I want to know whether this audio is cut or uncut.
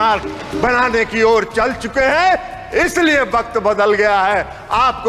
uncut